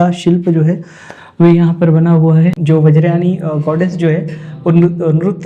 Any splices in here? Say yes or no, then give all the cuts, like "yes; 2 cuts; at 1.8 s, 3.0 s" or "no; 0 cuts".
yes; 1 cut; at 2.6 s